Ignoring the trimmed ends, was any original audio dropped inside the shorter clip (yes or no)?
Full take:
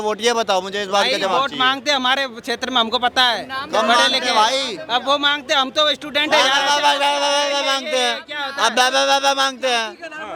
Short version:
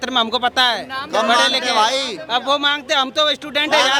no